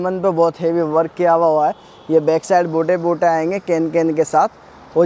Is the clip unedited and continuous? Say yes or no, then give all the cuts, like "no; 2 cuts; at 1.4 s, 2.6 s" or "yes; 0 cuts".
yes; 0 cuts